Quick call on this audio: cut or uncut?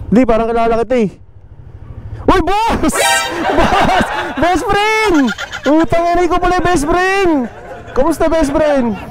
uncut